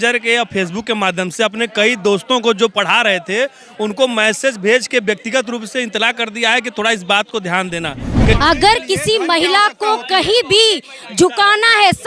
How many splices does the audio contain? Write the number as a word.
one